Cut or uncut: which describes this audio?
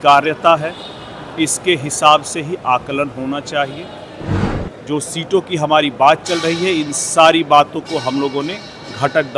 cut